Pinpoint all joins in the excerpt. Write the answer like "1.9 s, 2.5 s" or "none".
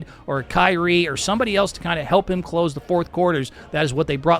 none